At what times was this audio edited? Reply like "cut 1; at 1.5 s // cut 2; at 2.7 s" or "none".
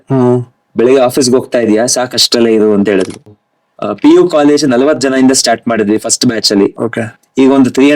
cut 1; at 3.4 s

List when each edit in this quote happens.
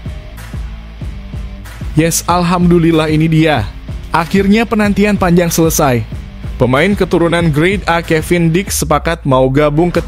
cut 1; at 1.9 s

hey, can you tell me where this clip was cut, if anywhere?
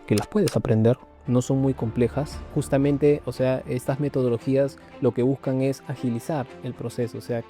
cut 1; at 2.5 s

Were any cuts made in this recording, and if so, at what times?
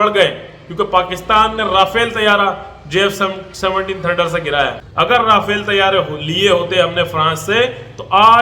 cut 1; at 4.8 s

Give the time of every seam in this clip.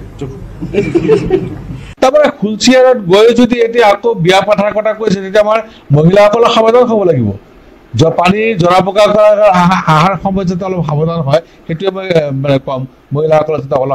cut 1; at 5.8 s

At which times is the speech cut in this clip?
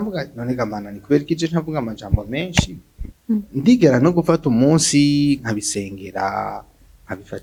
none

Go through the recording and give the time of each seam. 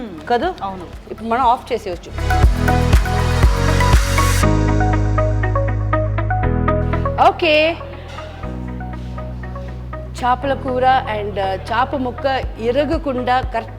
cut 1; at 2.1 s

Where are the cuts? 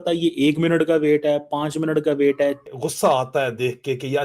cut 1; at 2.7 s

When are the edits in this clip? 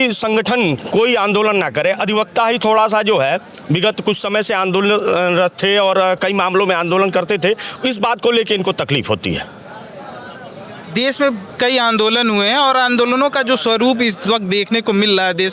none

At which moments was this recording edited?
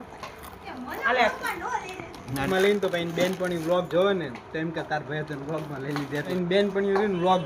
cut 1; at 2.5 s // cut 2; at 6.3 s

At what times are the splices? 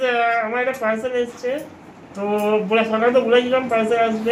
none

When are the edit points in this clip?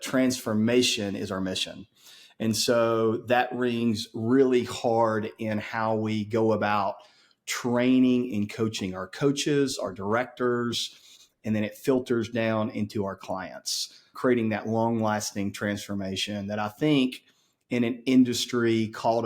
none

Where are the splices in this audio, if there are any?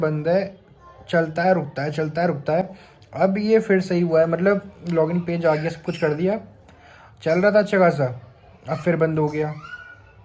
none

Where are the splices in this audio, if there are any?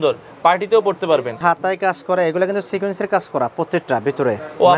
cut 1; at 1.4 s

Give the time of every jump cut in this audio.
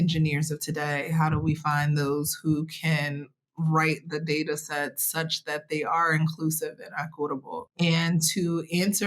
cut 1; at 7.7 s

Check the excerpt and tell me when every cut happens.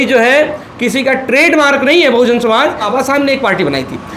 cut 1; at 2.9 s

